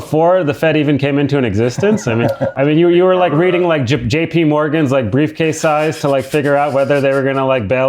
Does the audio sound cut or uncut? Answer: cut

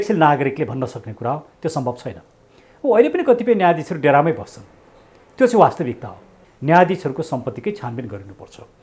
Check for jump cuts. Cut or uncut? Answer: cut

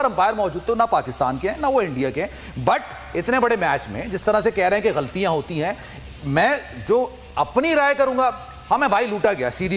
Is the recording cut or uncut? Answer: uncut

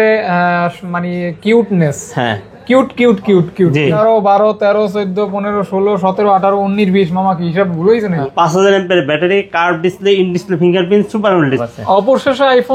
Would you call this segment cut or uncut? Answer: cut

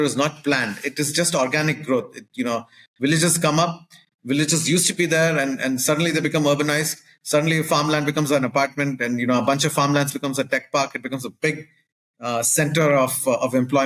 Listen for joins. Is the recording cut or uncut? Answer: uncut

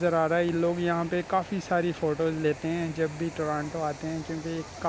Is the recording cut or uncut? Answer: uncut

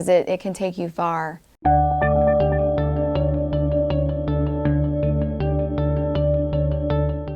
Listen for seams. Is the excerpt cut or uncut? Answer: cut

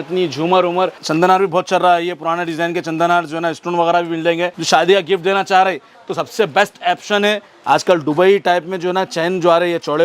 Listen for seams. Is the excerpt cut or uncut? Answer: cut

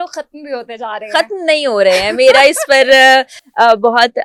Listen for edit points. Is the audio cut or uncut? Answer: uncut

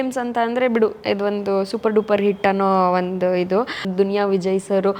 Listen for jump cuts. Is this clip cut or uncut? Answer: cut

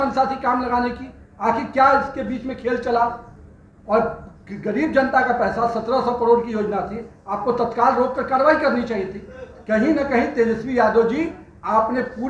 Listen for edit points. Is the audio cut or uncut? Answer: uncut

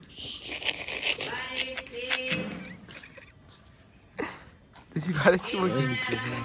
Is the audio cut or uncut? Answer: uncut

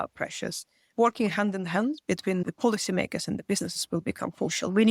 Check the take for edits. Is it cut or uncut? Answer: uncut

